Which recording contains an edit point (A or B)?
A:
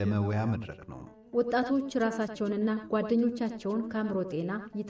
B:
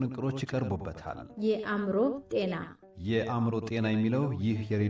B